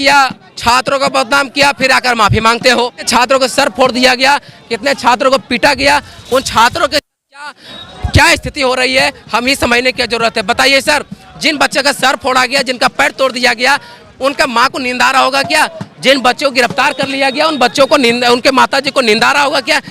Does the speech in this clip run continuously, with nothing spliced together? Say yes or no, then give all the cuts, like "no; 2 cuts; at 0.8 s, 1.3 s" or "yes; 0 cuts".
no; 1 cut; at 3.1 s